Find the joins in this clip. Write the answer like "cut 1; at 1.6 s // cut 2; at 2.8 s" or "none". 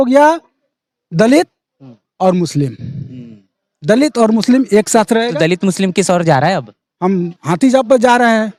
none